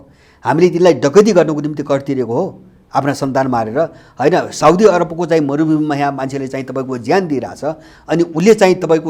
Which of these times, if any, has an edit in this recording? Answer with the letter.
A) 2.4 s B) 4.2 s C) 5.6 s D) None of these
D